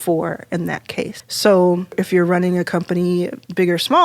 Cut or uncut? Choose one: uncut